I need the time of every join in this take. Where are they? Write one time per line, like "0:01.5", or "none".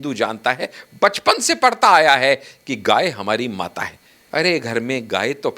0:04.1